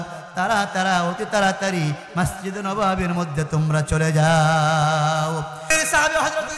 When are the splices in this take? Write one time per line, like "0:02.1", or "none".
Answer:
0:05.7